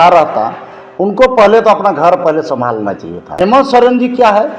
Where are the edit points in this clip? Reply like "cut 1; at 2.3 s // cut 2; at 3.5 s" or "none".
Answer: cut 1; at 3.3 s